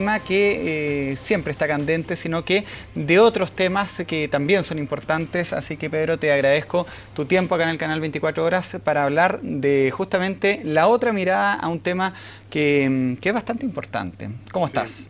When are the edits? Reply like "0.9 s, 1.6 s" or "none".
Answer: 12.9 s